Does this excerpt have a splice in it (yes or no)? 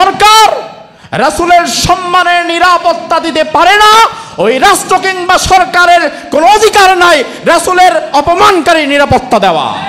no